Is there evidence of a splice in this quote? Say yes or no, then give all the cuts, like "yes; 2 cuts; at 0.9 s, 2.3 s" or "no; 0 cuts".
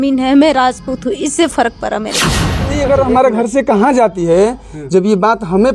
yes; 1 cut; at 2.5 s